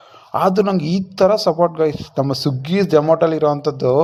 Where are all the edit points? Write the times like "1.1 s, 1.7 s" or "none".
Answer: none